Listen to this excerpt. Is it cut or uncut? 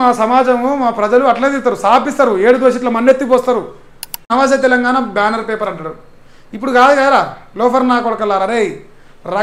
cut